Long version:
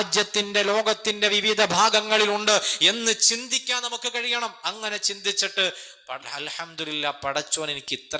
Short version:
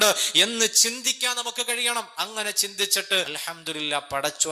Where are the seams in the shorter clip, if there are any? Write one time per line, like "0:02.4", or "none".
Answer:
0:03.4